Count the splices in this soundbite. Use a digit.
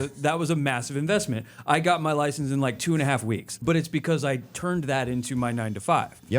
1